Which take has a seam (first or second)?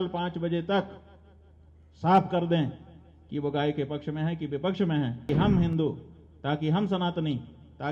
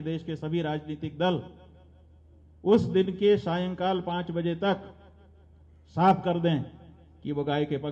first